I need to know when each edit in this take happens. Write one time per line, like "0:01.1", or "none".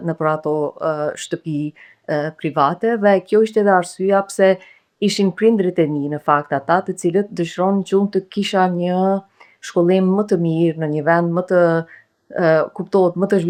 none